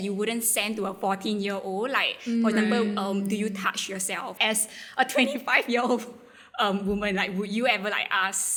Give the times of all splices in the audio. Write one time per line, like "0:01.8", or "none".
none